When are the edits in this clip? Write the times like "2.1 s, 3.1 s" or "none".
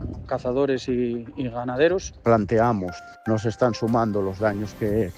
2.1 s